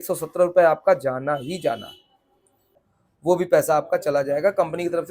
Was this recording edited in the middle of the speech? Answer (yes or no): yes